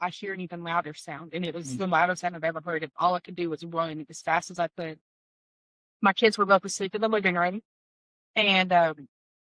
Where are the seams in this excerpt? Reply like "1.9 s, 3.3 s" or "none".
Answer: none